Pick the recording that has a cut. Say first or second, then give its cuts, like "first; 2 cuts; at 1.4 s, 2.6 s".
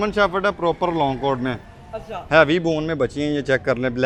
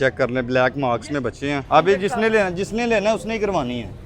second; 1 cut; at 1.6 s